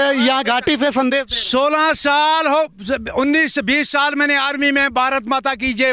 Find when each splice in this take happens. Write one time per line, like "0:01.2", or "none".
none